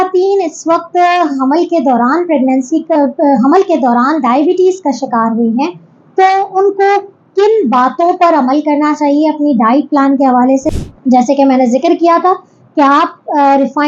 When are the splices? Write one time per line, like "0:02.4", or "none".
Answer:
0:10.7